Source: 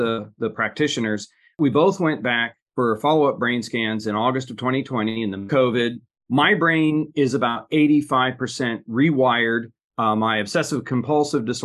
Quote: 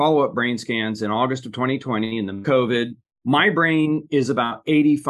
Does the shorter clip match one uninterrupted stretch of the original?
yes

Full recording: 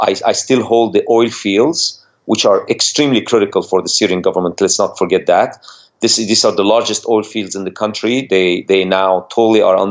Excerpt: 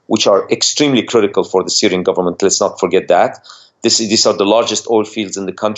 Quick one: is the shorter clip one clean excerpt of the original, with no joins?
yes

